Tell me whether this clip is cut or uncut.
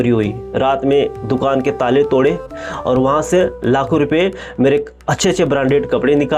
uncut